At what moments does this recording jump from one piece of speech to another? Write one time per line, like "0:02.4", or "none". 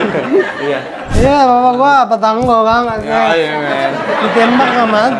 0:01.0